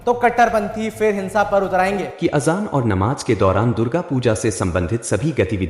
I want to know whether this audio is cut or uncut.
cut